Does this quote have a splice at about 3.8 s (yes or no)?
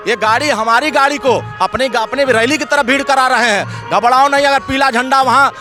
no